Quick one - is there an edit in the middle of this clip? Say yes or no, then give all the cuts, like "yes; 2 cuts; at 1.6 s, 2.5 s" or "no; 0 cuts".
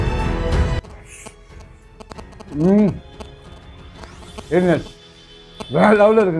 no; 0 cuts